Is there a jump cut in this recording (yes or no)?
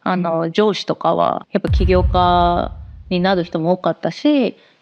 yes